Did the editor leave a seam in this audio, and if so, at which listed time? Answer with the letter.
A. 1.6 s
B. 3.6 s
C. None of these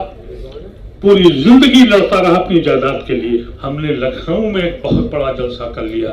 B